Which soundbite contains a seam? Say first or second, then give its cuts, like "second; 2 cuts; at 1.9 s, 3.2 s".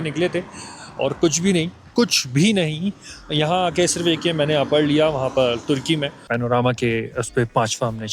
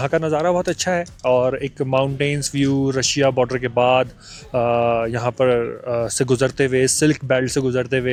first; 1 cut; at 6.2 s